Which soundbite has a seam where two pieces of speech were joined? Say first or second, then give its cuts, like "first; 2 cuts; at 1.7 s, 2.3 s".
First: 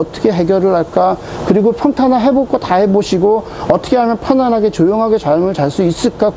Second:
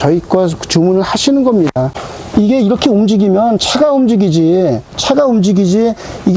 second; 2 cuts; at 2.0 s, 4.9 s